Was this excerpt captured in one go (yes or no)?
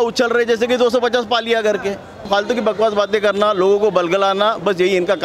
no